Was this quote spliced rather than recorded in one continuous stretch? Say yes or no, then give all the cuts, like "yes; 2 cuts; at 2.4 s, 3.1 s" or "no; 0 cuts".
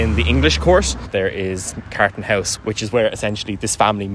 yes; 1 cut; at 1.1 s